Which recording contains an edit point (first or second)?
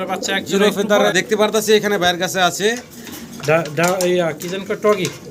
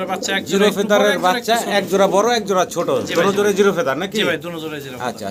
first